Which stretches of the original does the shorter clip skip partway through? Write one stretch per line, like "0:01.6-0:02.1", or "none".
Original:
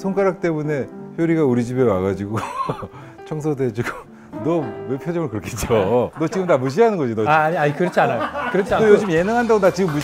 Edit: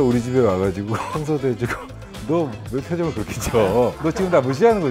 0:02.5-0:03.2

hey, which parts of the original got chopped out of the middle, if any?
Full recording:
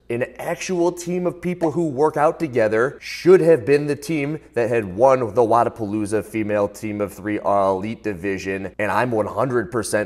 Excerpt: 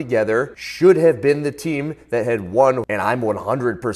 0:05.3-0:08.7

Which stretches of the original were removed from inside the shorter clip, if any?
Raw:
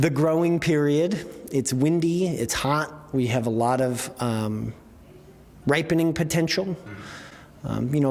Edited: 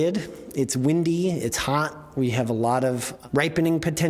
0:04.1-0:05.5

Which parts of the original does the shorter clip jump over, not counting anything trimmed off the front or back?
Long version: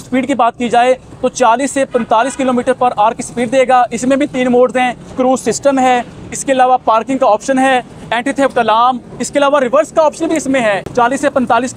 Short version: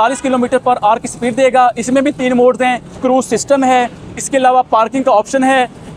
none

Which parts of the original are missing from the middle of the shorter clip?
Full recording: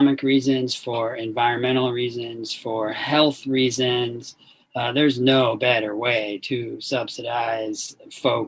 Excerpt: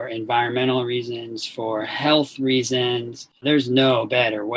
0:04.5-0:04.9

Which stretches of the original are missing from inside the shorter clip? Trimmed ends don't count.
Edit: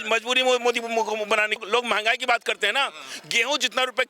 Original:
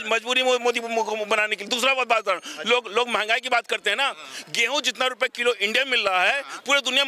0:01.6-0:02.9

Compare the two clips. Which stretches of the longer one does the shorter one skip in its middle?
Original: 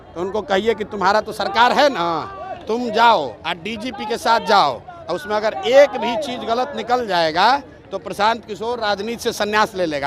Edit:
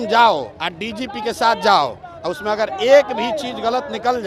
none

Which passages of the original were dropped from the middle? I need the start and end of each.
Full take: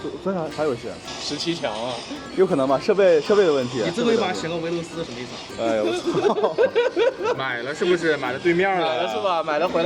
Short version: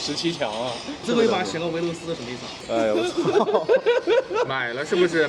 0:02.3-0:03.9

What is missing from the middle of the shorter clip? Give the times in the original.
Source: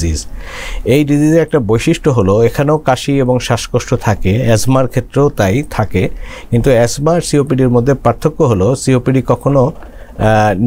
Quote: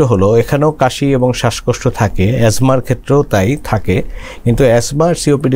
none

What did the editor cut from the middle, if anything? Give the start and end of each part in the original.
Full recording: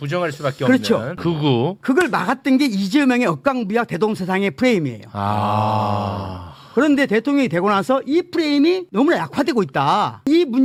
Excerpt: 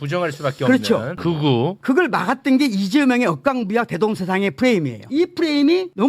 0:05.1-0:08.0

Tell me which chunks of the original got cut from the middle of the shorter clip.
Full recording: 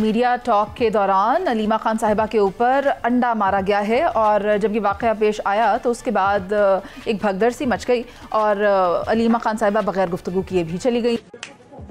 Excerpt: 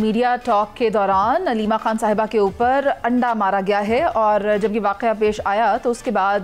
none

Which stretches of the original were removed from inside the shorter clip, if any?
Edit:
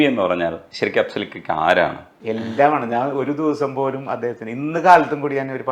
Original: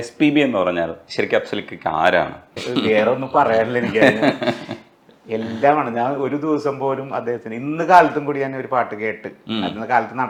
0:02.4-0:05.1

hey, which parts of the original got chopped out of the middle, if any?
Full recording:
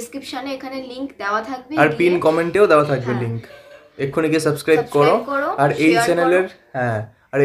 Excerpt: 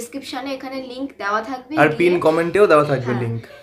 none

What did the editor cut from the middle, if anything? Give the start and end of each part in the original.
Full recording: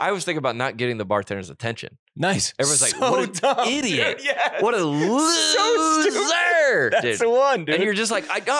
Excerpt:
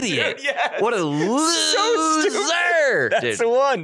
none

